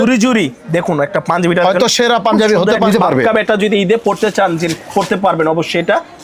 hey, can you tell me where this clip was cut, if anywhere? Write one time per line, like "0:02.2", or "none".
0:02.9